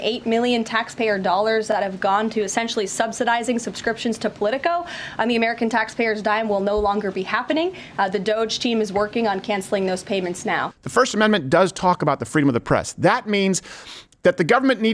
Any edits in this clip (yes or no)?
yes